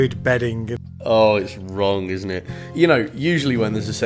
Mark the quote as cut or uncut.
cut